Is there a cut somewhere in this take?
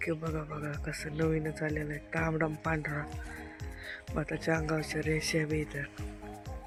no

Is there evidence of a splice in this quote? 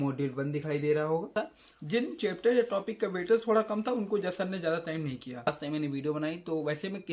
yes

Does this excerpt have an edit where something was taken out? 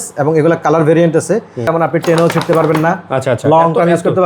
yes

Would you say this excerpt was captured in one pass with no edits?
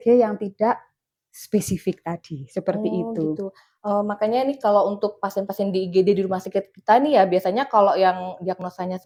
yes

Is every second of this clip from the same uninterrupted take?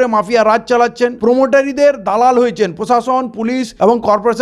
yes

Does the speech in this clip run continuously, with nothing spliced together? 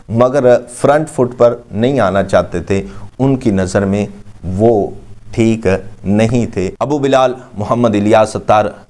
no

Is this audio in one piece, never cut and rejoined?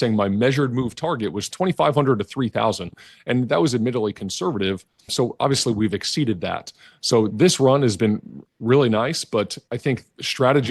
no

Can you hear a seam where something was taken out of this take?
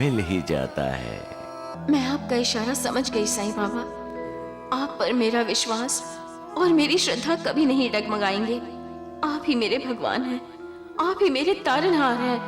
yes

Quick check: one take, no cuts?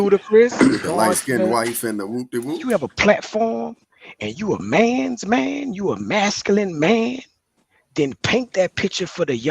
no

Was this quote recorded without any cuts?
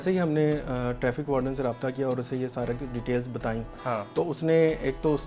yes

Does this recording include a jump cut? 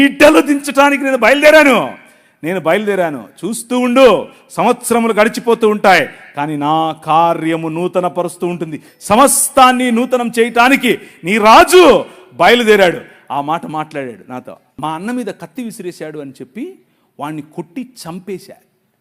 yes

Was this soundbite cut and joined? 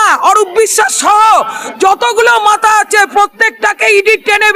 no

